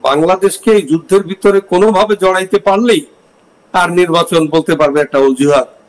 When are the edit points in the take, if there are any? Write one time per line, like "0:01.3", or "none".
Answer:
none